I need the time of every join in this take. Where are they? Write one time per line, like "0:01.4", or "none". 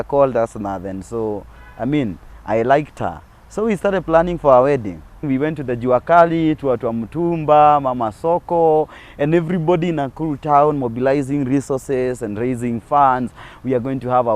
0:05.2